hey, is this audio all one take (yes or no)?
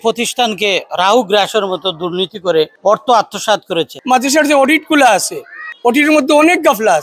no